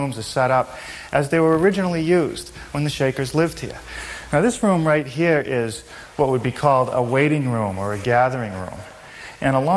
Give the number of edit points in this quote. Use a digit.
1